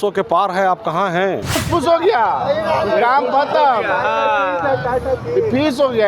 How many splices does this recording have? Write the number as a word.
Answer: one